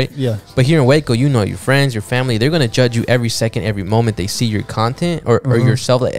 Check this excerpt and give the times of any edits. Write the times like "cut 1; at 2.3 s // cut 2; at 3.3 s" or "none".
none